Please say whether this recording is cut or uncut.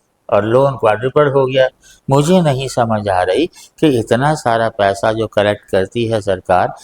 cut